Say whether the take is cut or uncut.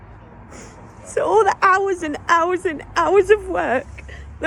uncut